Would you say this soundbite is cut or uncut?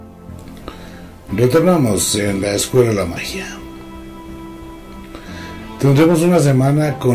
uncut